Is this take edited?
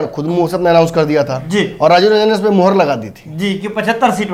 no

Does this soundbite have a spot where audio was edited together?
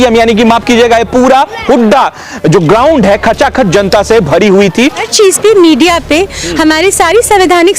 yes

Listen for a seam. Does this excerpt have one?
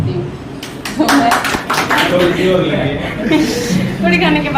yes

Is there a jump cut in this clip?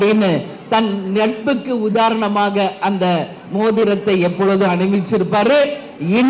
no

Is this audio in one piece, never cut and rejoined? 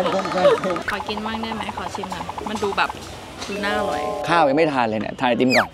no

